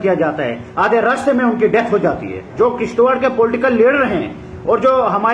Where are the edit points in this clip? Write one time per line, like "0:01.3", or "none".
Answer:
0:02.5